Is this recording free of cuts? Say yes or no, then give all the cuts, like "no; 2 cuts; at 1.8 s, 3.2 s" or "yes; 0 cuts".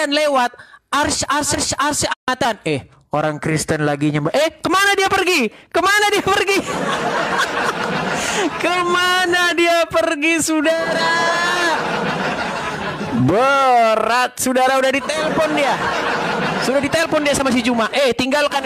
no; 1 cut; at 1.6 s